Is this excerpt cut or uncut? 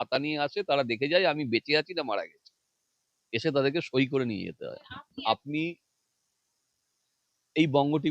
cut